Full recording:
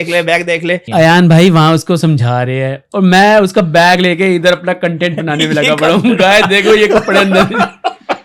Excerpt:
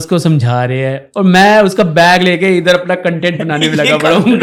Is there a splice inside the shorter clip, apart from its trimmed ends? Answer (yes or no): no